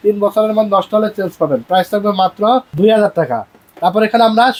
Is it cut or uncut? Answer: uncut